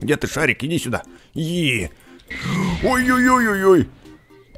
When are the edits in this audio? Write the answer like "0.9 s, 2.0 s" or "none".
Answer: 2.3 s